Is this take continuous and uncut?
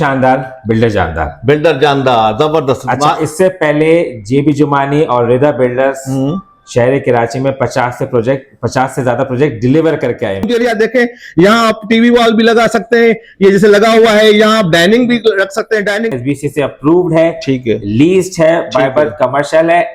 no; 2 cuts; at 10.5 s, 16.1 s

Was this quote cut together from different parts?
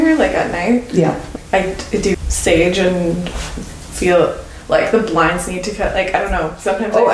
no; 0 cuts

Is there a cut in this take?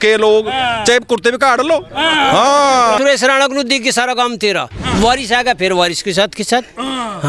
yes; 1 cut; at 3.0 s

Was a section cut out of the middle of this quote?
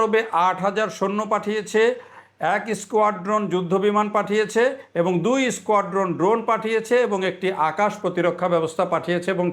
no; 0 cuts

